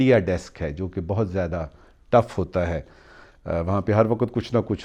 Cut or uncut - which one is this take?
uncut